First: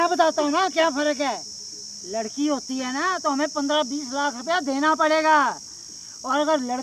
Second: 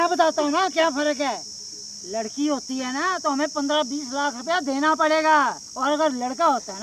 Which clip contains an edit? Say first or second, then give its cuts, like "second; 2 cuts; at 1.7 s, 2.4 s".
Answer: second; 1 cut; at 5.7 s